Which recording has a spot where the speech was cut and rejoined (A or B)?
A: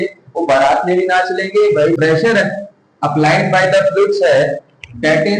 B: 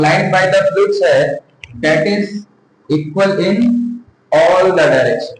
A